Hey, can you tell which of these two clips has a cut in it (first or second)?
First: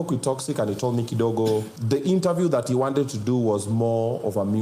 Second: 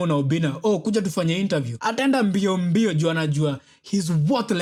first